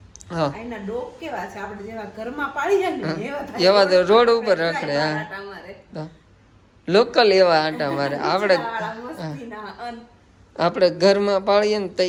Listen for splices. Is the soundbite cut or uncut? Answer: uncut